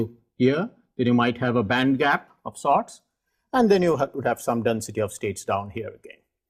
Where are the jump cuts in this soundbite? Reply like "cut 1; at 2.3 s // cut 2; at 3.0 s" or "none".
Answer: cut 1; at 3.6 s